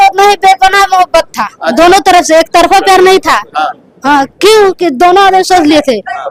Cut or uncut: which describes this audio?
uncut